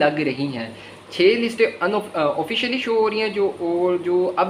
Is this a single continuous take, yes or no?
yes